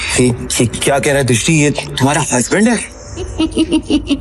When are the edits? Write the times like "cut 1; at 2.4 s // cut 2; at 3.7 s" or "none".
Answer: cut 1; at 3.3 s